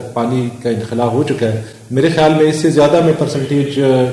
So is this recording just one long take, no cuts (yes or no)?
yes